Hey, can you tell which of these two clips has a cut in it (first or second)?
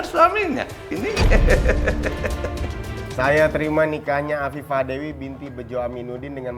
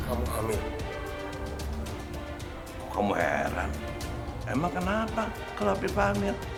first